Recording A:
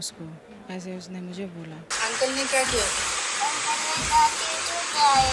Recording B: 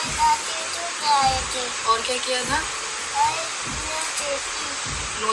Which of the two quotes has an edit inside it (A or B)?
A